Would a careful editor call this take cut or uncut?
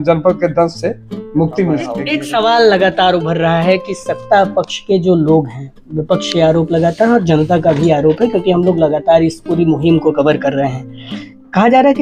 cut